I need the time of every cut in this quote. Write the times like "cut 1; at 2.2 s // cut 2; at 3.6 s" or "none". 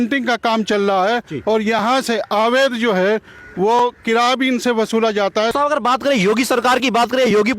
cut 1; at 5.5 s